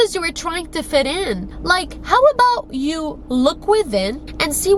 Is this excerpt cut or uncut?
uncut